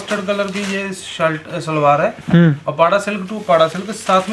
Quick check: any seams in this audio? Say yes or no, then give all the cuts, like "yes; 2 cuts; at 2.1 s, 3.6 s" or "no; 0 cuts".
no; 0 cuts